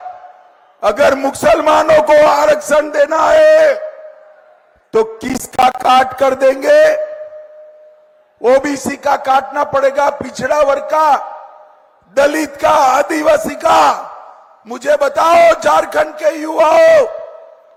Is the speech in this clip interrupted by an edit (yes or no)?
no